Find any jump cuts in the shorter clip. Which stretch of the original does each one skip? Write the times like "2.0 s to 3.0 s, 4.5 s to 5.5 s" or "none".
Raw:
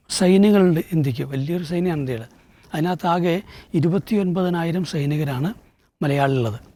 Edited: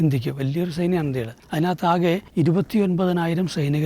2.3 s to 2.6 s, 3.5 s to 3.6 s